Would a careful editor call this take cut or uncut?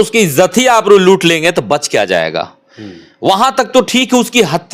uncut